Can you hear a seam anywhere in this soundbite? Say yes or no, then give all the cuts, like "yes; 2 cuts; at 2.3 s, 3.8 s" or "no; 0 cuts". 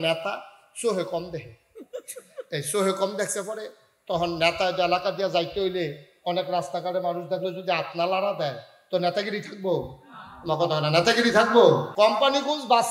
yes; 1 cut; at 11.9 s